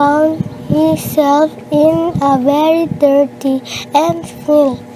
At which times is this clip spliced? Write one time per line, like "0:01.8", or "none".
none